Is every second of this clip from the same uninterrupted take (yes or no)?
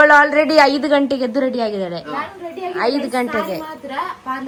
yes